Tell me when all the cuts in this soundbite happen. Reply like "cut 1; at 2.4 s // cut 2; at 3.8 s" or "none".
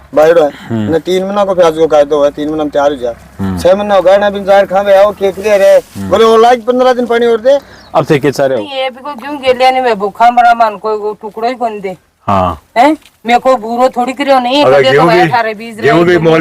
cut 1; at 8.7 s